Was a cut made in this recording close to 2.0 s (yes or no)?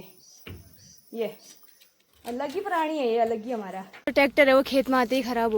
no